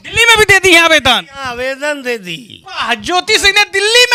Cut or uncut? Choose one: uncut